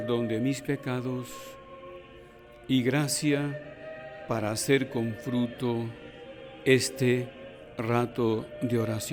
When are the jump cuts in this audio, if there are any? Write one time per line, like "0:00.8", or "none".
none